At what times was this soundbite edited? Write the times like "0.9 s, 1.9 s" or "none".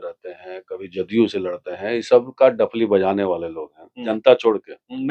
4.1 s